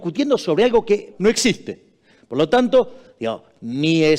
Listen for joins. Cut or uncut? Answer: cut